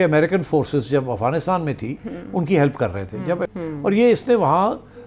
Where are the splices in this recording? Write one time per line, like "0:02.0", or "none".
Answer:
0:03.5